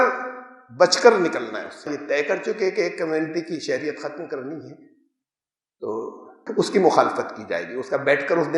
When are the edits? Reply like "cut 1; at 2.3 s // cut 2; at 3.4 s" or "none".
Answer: cut 1; at 1.9 s // cut 2; at 6.4 s